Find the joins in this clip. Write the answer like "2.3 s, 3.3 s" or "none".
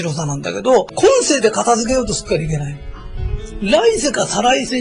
0.9 s